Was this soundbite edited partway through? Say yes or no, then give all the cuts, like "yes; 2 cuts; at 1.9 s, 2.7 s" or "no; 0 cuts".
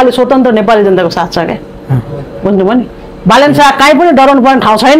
no; 0 cuts